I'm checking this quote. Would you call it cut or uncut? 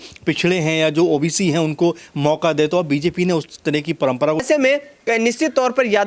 cut